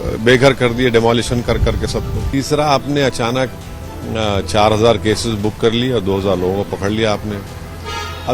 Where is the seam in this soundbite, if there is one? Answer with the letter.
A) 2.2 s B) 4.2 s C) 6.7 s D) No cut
A